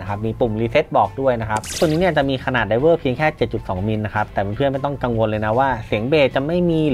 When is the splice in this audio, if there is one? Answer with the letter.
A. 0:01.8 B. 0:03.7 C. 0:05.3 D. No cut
A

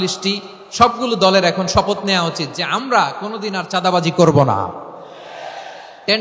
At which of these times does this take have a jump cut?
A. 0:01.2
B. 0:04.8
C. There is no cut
C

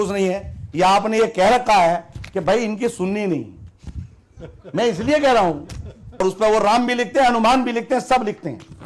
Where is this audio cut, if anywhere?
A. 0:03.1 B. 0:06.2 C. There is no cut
B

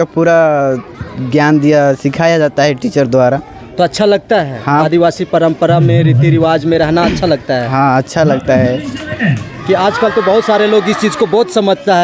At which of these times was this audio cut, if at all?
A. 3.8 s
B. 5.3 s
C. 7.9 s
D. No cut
D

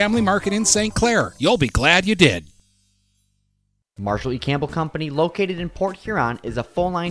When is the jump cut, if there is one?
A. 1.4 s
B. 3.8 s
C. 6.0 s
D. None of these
B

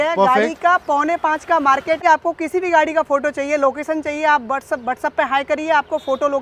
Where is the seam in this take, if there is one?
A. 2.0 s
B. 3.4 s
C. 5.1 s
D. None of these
A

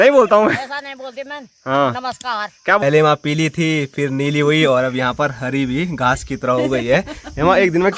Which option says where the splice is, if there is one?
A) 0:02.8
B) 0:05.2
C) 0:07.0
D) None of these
A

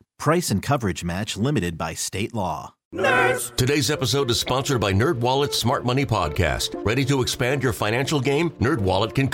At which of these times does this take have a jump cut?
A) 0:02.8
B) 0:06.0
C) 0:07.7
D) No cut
A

